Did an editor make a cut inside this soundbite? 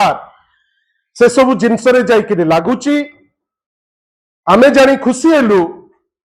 no; 0 cuts

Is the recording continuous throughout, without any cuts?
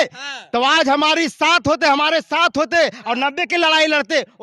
yes; 0 cuts

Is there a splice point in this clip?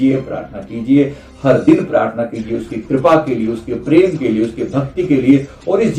no; 0 cuts

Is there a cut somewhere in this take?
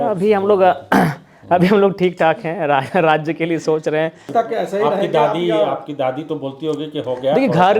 yes; 1 cut; at 4.3 s

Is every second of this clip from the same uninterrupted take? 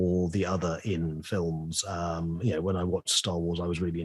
yes; 0 cuts

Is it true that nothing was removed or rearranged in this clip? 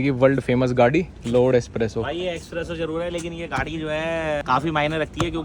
no; 2 cuts; at 1.1 s, 4.4 s

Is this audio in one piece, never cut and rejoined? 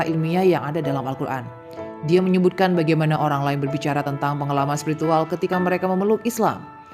yes; 0 cuts

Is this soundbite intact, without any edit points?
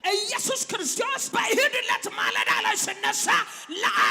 no; 1 cut; at 1.0 s

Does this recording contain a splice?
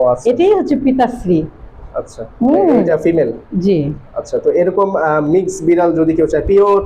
yes; 1 cut; at 2.9 s

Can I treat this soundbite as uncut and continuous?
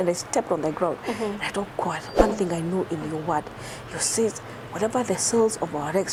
yes; 0 cuts

